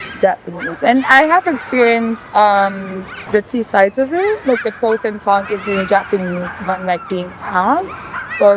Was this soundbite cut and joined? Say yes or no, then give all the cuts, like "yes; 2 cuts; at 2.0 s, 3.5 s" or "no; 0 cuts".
no; 0 cuts